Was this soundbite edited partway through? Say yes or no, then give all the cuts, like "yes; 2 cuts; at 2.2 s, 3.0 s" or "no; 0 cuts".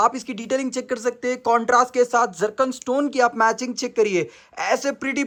no; 0 cuts